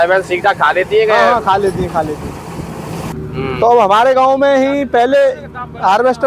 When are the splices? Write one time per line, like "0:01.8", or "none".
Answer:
0:03.1